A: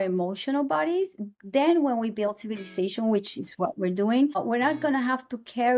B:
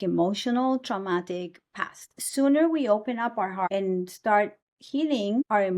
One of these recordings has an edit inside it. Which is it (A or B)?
B